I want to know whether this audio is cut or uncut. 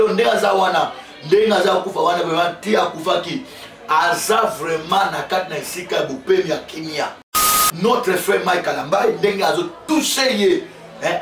cut